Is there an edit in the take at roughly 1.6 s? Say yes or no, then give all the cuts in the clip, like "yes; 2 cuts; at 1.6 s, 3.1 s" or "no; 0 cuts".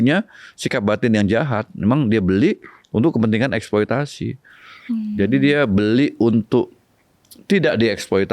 no; 0 cuts